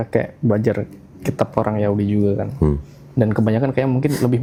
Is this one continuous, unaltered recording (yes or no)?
yes